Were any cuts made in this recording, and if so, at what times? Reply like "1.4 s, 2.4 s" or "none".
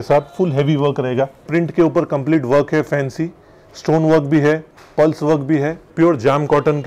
1.5 s, 5.9 s